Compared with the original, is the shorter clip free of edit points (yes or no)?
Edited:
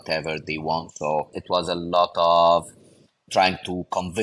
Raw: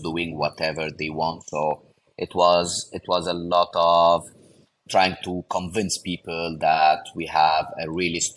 no